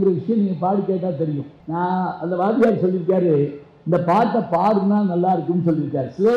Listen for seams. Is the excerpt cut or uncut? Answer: cut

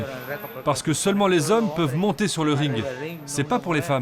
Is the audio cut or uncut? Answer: uncut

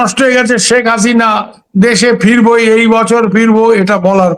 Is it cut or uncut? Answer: uncut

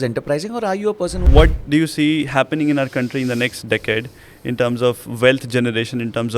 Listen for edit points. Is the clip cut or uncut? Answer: cut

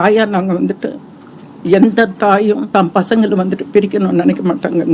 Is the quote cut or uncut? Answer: cut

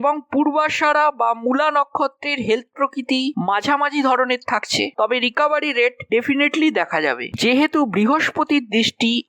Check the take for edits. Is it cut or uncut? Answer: cut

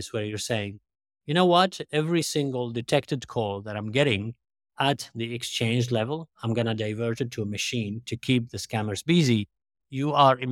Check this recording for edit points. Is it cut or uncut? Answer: uncut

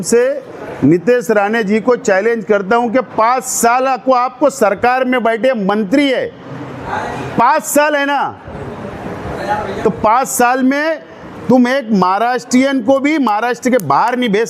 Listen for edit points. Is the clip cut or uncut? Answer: uncut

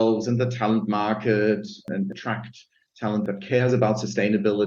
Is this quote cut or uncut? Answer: cut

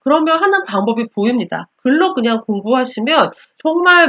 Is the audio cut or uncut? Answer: cut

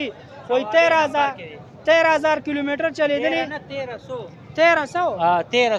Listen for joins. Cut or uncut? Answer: uncut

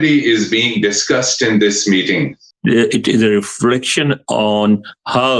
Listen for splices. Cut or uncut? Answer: cut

